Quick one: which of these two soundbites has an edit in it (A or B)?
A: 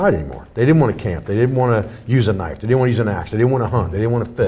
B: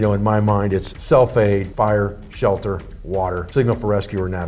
B